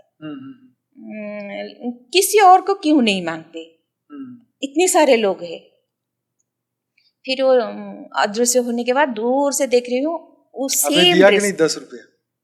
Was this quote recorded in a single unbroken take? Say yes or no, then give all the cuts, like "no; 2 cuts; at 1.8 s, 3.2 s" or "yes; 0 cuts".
yes; 0 cuts